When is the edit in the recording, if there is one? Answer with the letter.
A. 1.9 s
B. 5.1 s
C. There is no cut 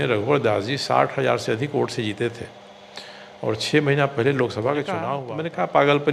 B